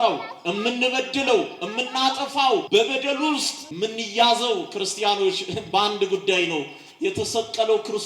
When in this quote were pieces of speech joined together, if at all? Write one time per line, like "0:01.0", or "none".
0:02.6
0:03.6